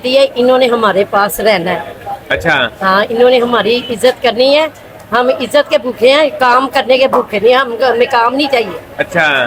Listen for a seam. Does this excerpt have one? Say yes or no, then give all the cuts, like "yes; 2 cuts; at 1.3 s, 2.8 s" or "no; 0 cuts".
no; 0 cuts